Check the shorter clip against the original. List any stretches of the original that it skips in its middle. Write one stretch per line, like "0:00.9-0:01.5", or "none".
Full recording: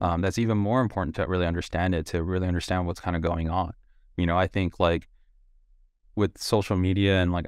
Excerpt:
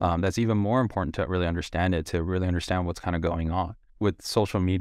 0:03.8-0:06.0